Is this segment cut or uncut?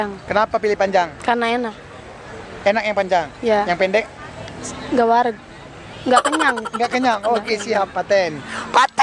uncut